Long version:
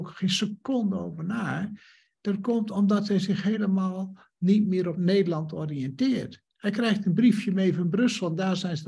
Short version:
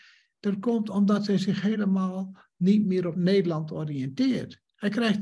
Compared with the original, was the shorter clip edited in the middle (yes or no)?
no